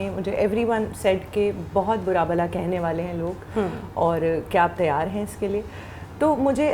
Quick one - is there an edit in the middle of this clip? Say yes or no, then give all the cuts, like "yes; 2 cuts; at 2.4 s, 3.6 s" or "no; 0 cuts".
no; 0 cuts